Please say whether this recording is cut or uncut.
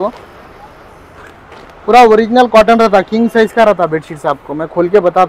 uncut